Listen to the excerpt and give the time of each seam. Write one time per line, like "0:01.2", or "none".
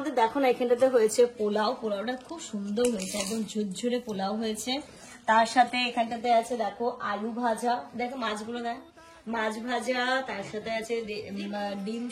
none